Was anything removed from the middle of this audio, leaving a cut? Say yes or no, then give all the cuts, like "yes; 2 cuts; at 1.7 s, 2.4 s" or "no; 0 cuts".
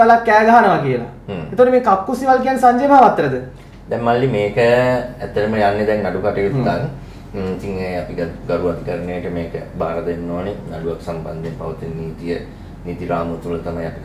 no; 0 cuts